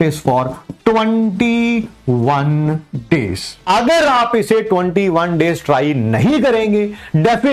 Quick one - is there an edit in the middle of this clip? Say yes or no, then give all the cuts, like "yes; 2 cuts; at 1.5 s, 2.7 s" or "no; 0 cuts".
no; 0 cuts